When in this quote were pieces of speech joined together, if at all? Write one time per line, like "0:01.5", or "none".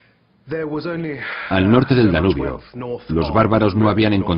0:02.3